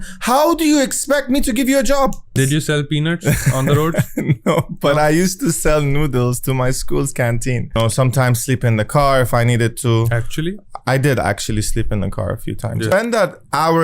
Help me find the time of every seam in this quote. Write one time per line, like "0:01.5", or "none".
0:02.4
0:07.7
0:12.9